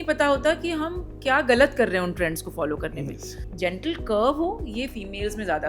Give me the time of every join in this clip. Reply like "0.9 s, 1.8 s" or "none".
3.4 s